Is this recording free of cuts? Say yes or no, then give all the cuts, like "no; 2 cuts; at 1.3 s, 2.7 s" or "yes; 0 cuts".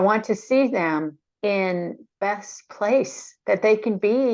no; 2 cuts; at 1.2 s, 2.1 s